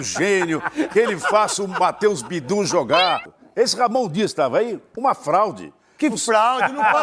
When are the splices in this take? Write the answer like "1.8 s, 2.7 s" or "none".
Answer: 3.3 s